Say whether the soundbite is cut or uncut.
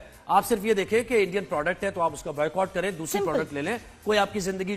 uncut